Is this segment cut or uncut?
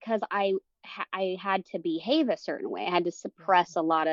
uncut